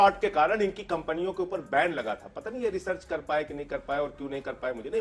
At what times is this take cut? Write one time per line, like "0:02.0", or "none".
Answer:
none